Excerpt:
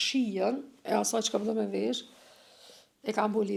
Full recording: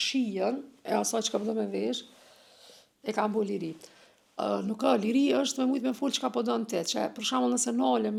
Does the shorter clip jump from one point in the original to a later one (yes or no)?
no